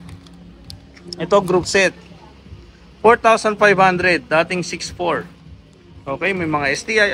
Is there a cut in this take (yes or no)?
no